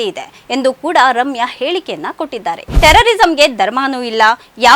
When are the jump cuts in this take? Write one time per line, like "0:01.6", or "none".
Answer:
0:02.7